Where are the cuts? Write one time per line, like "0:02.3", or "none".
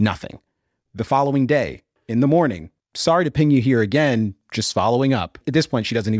none